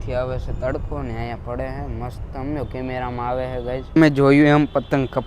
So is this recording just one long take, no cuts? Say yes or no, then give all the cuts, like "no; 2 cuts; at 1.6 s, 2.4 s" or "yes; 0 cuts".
no; 1 cut; at 3.9 s